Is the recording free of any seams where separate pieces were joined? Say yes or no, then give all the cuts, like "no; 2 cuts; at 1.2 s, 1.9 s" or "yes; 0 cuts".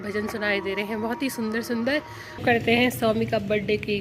no; 1 cut; at 2.4 s